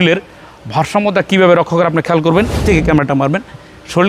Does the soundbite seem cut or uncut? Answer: cut